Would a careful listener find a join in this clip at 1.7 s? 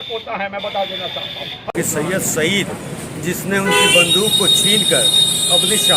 yes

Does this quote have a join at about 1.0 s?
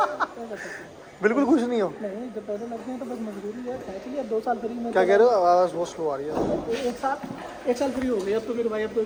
no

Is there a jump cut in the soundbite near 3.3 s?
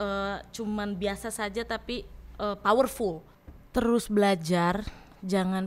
yes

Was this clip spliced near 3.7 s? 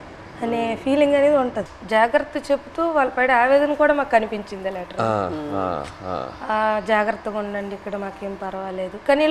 no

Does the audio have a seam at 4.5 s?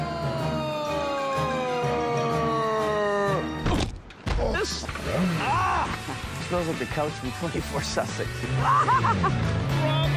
no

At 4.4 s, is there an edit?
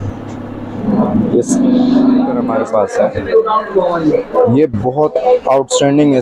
no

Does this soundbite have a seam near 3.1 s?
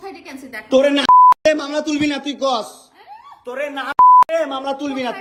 no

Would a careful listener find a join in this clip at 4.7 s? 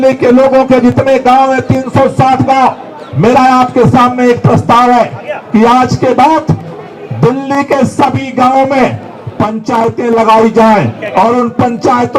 no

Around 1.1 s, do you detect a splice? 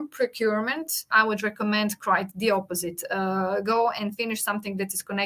yes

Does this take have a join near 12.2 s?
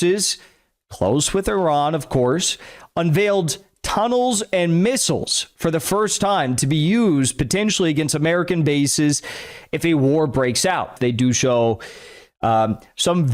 no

